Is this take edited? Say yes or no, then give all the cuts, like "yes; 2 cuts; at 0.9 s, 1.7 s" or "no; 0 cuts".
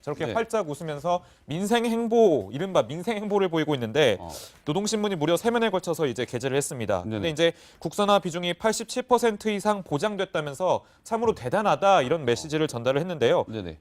yes; 1 cut; at 9.4 s